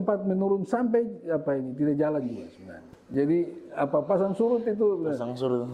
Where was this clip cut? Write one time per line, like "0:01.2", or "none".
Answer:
none